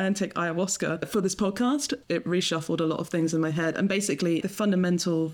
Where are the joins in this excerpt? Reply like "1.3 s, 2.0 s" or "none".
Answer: 1.0 s, 2.0 s, 4.4 s